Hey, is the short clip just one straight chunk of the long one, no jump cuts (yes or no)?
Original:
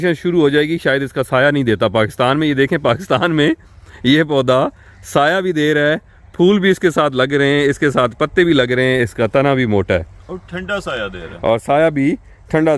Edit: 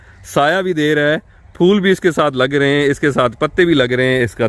yes